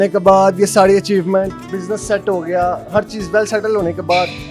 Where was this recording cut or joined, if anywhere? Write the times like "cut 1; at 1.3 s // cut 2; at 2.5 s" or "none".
none